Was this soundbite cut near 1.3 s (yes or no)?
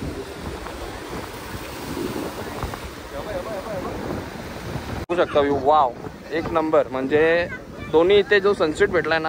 no